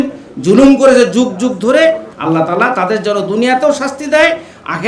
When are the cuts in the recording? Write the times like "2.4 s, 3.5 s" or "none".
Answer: 2.1 s